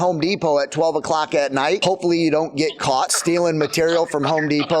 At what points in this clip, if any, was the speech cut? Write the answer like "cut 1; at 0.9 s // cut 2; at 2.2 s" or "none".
cut 1; at 1.8 s // cut 2; at 3.1 s